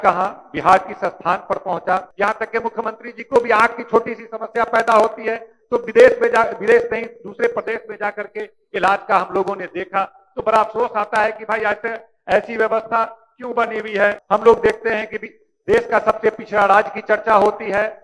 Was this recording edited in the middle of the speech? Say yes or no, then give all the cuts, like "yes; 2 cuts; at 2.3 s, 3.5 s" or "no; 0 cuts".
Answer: yes; 2 cuts; at 2.1 s, 14.2 s